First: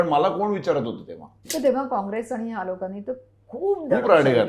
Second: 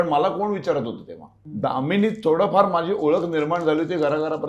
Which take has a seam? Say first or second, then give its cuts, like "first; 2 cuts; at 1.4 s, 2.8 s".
first; 1 cut; at 1.4 s